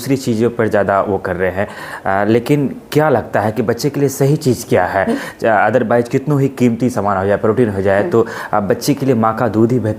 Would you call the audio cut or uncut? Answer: uncut